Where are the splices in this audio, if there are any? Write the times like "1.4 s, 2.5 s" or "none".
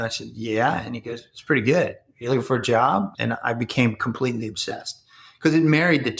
3.1 s